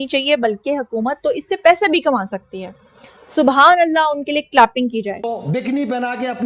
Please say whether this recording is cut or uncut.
cut